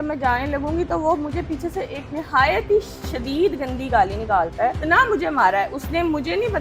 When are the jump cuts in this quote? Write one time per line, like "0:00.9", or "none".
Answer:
0:04.8